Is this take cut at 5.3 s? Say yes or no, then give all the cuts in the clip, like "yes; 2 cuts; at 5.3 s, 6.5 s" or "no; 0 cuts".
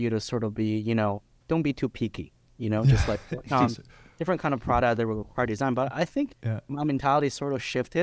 no; 1 cut; at 1.4 s